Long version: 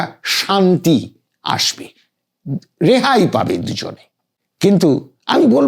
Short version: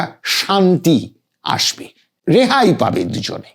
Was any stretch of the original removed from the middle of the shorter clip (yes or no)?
yes